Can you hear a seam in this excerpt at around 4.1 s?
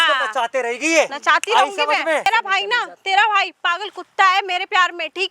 no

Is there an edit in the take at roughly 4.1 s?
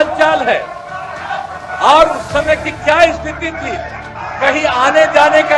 no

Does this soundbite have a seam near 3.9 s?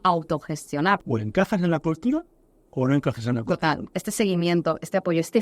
yes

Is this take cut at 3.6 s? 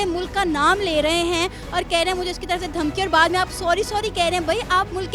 no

